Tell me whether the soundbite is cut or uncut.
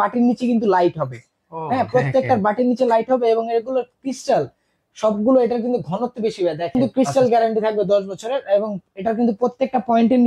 cut